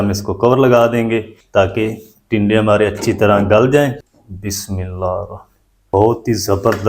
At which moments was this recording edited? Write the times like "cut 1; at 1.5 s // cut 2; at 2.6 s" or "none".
cut 1; at 1.4 s // cut 2; at 4.0 s // cut 3; at 5.8 s